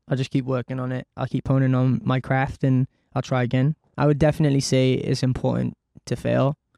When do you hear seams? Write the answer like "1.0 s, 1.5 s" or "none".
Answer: 3.9 s